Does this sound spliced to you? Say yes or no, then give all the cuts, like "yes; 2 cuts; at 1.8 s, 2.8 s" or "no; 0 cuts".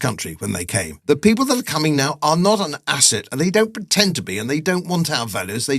yes; 1 cut; at 0.9 s